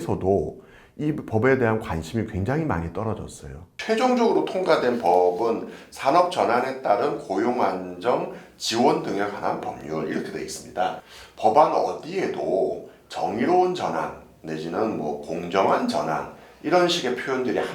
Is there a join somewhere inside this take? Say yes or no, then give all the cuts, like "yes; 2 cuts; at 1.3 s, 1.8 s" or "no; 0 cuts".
yes; 2 cuts; at 3.7 s, 11.0 s